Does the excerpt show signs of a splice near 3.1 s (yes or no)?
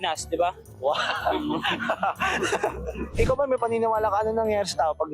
yes